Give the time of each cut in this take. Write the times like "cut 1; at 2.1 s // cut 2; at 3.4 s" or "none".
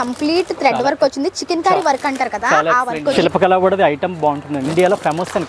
cut 1; at 3.1 s // cut 2; at 4.7 s